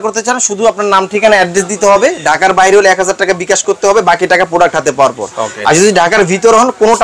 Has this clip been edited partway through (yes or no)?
no